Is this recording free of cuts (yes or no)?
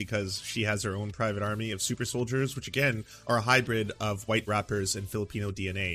yes